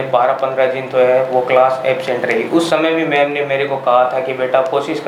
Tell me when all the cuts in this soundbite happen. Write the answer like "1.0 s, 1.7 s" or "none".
none